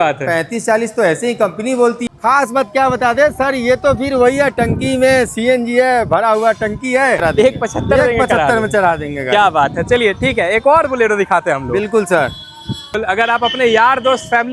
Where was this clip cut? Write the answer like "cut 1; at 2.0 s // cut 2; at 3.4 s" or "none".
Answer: cut 1; at 2.0 s // cut 2; at 7.2 s // cut 3; at 13.0 s

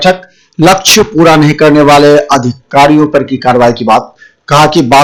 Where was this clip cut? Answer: none

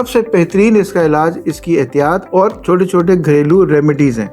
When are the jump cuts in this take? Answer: cut 1; at 2.2 s

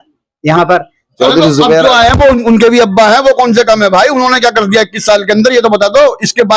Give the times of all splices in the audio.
cut 1; at 1.1 s

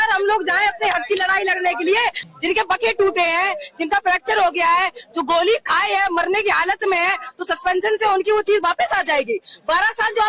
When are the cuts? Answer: cut 1; at 2.3 s

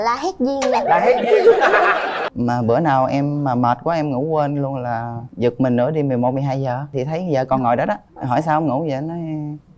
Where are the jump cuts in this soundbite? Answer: cut 1; at 2.3 s

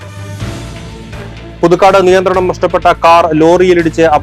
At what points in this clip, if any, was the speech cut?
cut 1; at 1.2 s

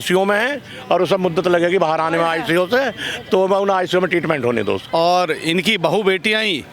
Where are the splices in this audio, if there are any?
cut 1; at 4.8 s

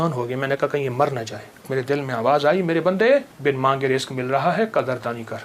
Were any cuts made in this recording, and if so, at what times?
cut 1; at 1.7 s // cut 2; at 3.3 s

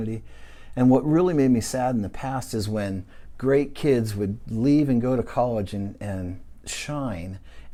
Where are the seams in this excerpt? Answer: none

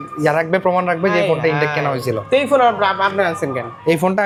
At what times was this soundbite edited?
none

